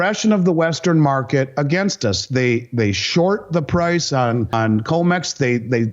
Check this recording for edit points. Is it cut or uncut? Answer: cut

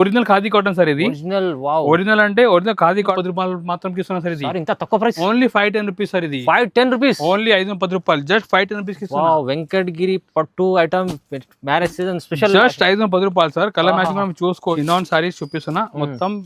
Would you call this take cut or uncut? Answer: cut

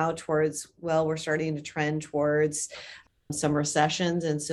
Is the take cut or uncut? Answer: uncut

